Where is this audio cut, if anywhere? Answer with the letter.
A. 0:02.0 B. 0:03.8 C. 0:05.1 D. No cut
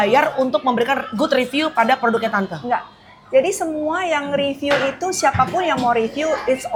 D